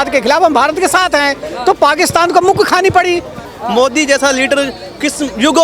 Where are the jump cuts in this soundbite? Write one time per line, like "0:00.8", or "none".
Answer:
0:03.5